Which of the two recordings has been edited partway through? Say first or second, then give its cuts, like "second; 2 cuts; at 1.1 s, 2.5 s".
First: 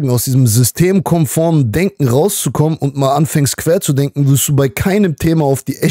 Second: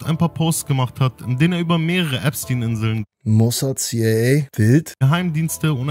second; 2 cuts; at 3.1 s, 4.7 s